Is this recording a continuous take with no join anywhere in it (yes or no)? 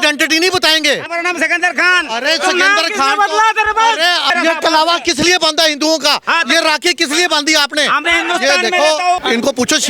no